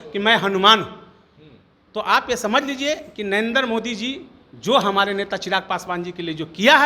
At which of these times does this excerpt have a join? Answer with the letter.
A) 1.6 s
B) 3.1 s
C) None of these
C